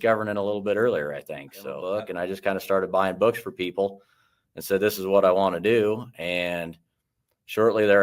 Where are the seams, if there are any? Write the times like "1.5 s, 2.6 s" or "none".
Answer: 1.8 s

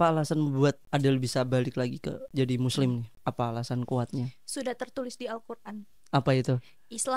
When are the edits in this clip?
0.8 s, 2.2 s, 3.1 s

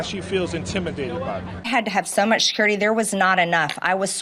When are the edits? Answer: 1.5 s

